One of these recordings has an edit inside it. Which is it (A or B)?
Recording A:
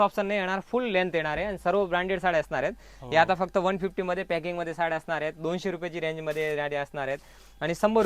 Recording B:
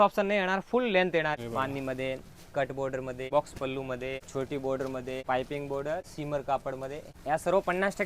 B